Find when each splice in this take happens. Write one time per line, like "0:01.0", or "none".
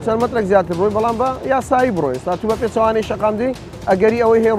none

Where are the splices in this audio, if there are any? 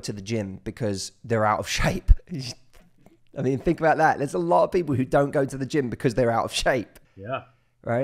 0:07.0

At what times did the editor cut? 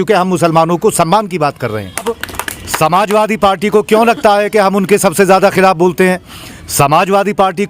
0:02.0

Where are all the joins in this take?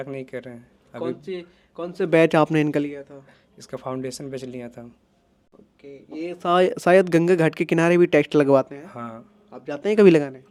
none

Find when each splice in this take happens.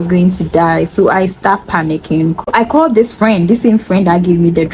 0:02.5

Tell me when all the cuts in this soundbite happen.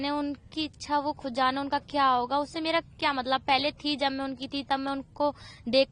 none

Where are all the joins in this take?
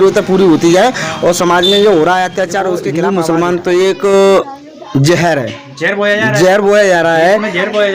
0:02.9

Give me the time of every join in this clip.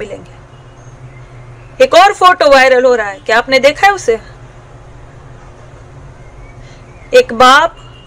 0:01.0

